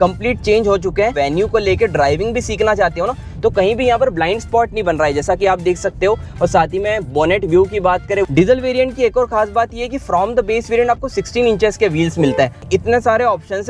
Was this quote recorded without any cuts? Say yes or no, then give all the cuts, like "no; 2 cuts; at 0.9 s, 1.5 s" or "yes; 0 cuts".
no; 3 cuts; at 1.1 s, 8.3 s, 12.6 s